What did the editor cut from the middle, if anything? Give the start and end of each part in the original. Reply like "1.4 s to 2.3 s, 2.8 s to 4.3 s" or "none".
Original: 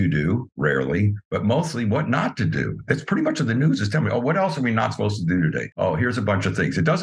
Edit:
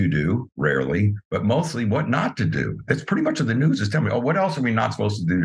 none